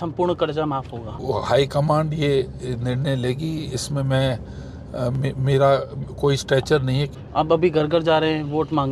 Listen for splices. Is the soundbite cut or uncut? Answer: cut